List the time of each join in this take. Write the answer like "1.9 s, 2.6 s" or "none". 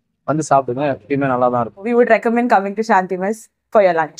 1.9 s

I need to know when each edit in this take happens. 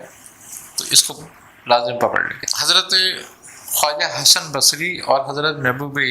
2.7 s

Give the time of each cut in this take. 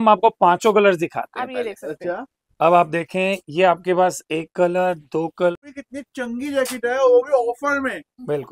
5.5 s

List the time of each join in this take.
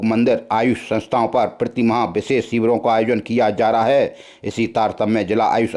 none

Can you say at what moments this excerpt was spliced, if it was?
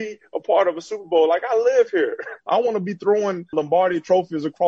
2.4 s, 3.5 s

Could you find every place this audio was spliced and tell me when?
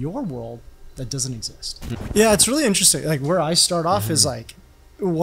1.9 s

